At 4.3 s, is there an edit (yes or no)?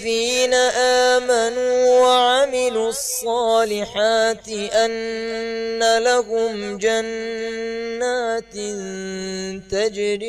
no